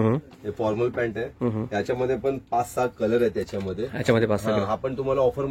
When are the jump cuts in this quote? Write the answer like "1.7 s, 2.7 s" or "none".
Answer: none